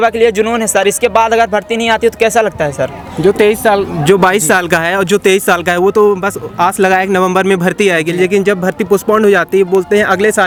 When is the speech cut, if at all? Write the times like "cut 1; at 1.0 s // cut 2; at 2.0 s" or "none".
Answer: none